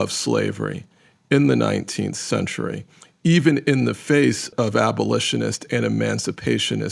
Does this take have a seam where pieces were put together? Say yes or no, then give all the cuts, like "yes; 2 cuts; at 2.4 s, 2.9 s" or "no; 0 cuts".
yes; 1 cut; at 4.5 s